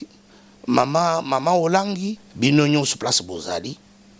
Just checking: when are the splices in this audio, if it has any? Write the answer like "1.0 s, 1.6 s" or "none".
2.2 s